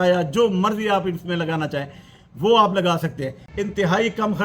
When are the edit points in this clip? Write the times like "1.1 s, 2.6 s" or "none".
3.4 s